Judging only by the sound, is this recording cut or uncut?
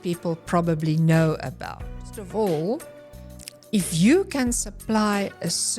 cut